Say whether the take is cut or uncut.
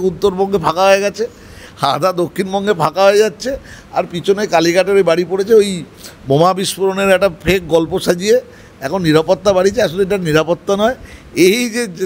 uncut